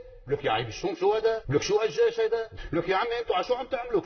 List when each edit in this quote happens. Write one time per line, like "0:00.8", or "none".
0:01.4
0:02.5

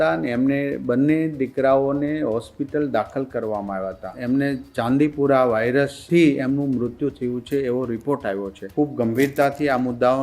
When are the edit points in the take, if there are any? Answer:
0:04.1
0:08.6

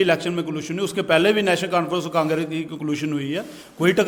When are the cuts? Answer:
none

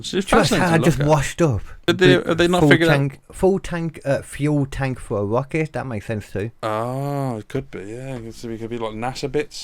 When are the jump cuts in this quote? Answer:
0:01.7

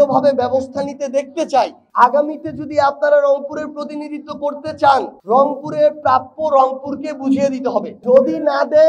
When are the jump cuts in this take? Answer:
0:01.8

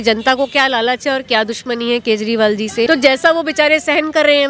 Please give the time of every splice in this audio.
0:02.9

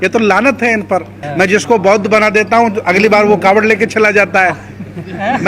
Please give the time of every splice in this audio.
0:01.2

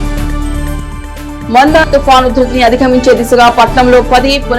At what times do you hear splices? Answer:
0:01.3

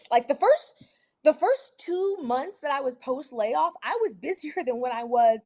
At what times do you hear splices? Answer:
none

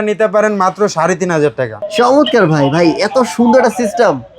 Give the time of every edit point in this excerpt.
0:01.8

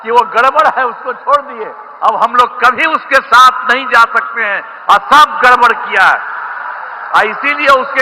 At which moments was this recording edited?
0:07.0

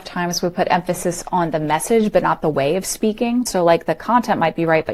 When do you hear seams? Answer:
0:03.5

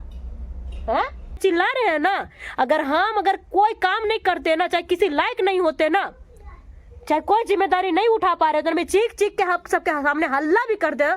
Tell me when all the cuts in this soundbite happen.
0:01.4

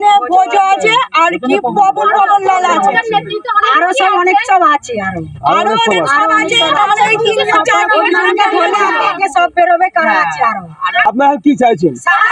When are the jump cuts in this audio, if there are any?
none

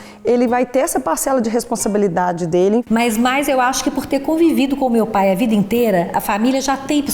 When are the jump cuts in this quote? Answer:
0:02.8

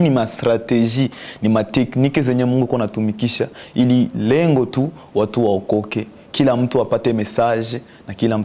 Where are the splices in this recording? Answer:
none

